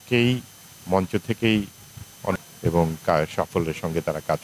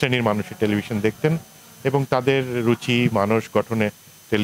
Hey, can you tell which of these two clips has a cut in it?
first; 1 cut; at 2.4 s

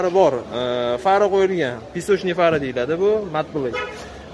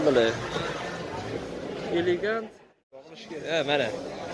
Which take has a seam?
second; 1 cut; at 3.2 s

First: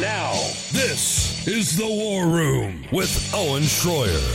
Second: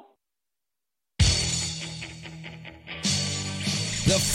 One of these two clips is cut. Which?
second; 1 cut; at 1.2 s

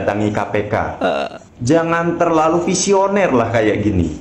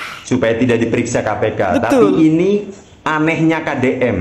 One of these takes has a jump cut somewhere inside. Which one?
first; 1 cut; at 1.4 s

